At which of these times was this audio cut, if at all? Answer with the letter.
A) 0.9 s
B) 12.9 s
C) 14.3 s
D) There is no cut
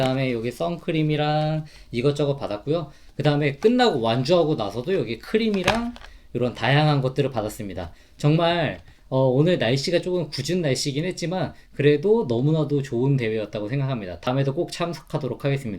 C